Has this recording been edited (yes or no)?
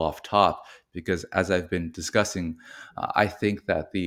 no